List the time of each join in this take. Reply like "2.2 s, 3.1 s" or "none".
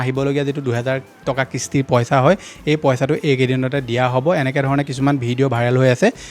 none